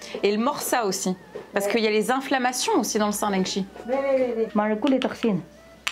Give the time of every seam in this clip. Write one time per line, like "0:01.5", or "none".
0:04.5